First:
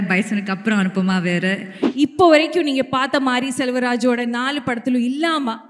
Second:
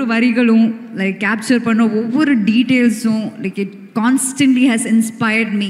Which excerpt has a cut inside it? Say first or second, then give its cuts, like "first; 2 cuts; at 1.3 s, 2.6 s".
first; 1 cut; at 1.8 s